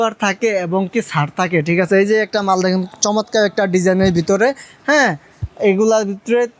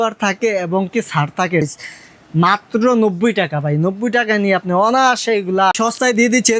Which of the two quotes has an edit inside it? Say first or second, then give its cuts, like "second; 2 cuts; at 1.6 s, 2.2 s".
second; 2 cuts; at 1.7 s, 5.7 s